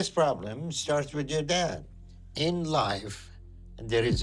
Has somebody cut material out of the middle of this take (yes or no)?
no